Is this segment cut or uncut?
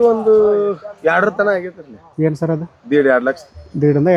uncut